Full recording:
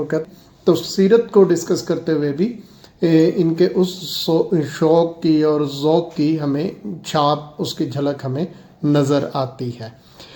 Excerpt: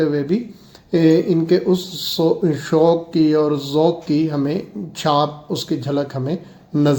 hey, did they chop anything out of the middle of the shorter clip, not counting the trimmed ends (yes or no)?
no